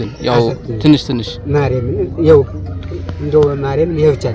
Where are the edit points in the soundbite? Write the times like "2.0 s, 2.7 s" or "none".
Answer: none

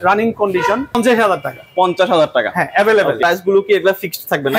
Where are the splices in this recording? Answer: 0.9 s, 3.2 s

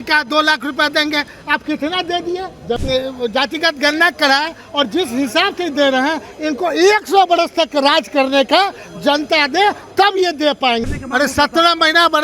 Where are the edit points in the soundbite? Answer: 2.8 s, 10.8 s

